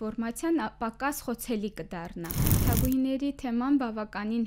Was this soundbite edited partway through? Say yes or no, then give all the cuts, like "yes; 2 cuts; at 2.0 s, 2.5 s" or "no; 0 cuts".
yes; 1 cut; at 2.4 s